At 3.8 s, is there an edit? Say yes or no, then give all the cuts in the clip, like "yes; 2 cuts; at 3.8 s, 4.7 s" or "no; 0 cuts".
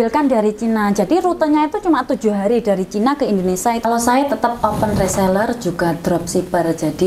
yes; 1 cut; at 3.8 s